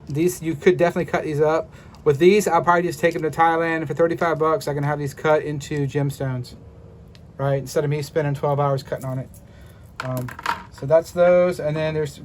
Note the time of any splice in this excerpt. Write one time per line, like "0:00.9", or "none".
none